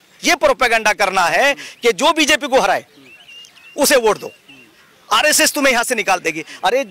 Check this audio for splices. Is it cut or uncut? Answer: uncut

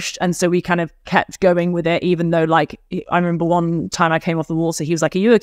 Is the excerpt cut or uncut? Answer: uncut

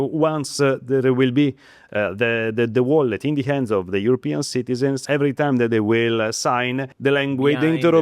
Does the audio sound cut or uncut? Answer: cut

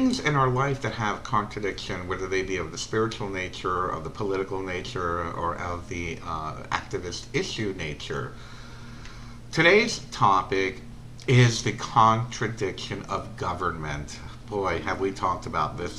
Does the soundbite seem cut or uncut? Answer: cut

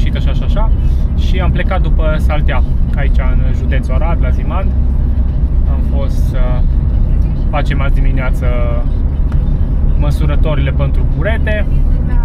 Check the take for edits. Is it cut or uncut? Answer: uncut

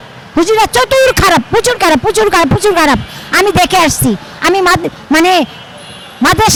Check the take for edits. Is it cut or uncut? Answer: uncut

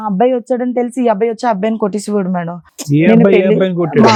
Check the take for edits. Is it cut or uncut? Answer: uncut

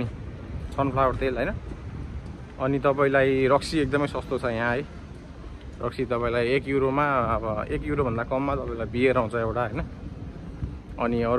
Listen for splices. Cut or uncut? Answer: uncut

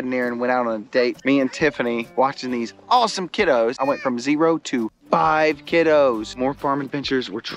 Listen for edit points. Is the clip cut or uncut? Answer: cut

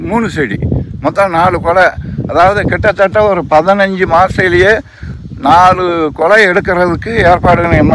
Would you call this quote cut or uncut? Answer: uncut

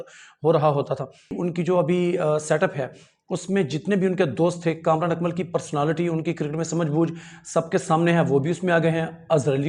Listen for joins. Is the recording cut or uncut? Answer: cut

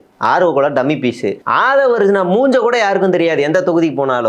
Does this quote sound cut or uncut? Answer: cut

